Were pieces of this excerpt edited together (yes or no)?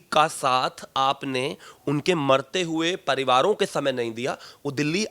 no